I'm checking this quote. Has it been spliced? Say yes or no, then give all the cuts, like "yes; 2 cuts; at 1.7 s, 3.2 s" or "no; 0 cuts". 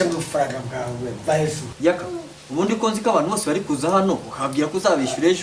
no; 0 cuts